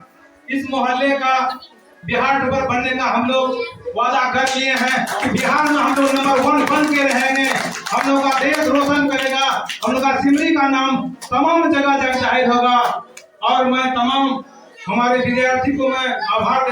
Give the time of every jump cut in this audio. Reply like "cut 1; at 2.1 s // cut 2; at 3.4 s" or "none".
none